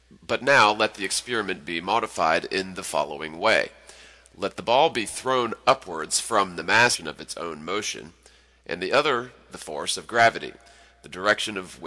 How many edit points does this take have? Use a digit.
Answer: 0